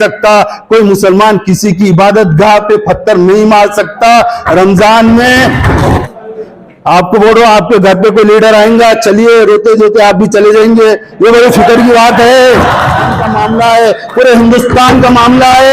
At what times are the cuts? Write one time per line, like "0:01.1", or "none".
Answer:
0:06.0
0:13.2